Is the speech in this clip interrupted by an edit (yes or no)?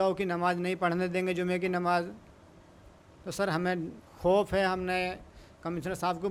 no